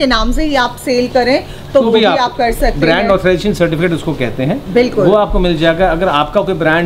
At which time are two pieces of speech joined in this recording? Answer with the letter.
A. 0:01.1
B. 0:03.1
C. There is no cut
C